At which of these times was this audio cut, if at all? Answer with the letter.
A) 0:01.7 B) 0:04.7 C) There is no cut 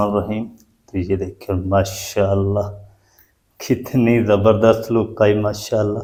C